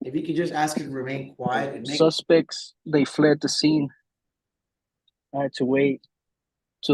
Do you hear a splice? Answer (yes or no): yes